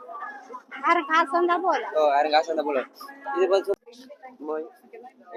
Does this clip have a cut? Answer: yes; 1 cut; at 3.8 s

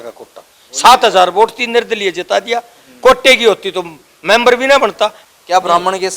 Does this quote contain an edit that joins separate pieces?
yes; 1 cut; at 5.2 s

